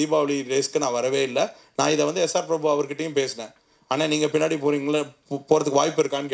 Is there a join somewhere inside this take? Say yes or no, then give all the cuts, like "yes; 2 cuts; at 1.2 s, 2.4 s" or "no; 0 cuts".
no; 0 cuts